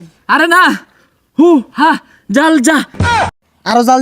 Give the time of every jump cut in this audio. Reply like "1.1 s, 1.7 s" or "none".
3.1 s